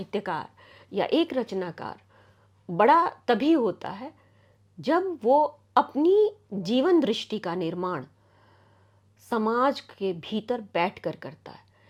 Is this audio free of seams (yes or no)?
yes